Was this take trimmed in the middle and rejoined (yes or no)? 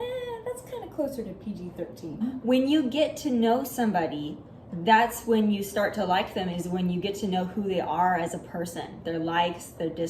yes